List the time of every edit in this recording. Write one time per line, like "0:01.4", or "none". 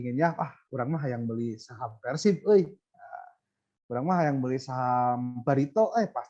none